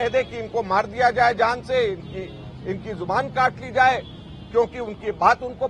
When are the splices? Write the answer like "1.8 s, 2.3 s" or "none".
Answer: none

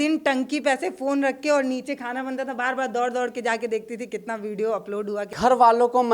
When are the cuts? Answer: 5.2 s

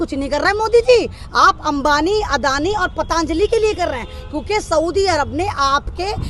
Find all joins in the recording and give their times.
none

